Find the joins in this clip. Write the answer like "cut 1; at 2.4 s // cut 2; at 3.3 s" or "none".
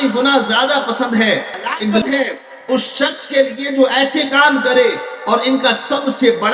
cut 1; at 2.0 s